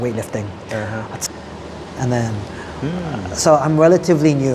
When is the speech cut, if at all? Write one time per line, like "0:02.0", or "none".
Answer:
0:01.2